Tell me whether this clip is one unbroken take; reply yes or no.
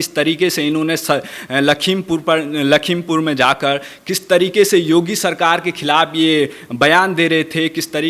yes